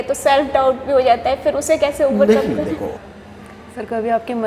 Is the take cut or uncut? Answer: cut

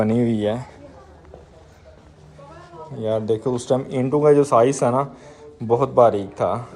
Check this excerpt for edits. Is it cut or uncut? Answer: uncut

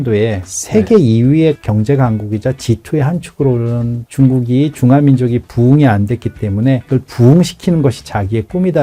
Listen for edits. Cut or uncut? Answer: uncut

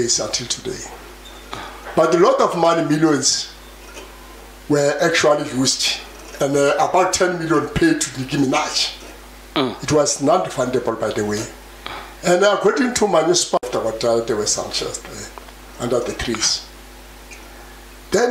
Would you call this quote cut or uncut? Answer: cut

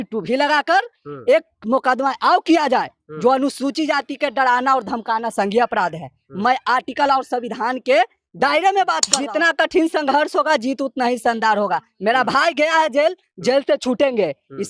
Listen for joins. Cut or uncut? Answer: cut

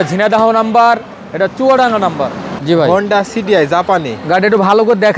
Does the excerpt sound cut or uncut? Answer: cut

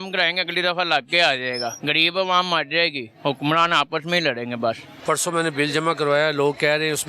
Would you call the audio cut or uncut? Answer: cut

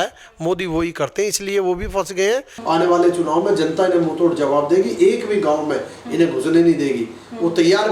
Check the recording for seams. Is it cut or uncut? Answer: cut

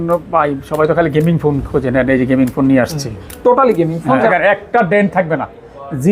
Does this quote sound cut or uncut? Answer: cut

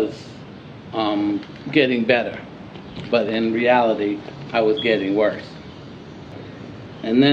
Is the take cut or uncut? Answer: cut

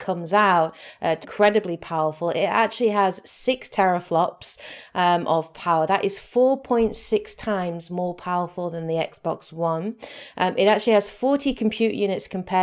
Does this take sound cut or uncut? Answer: uncut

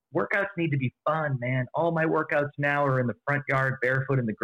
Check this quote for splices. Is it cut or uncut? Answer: uncut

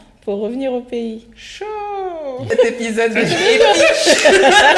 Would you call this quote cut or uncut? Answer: cut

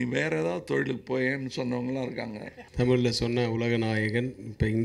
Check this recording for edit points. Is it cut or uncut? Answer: cut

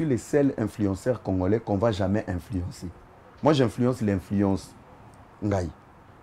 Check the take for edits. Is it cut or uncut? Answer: uncut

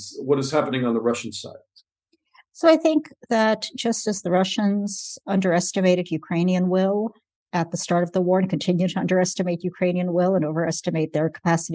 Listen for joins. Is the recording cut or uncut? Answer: uncut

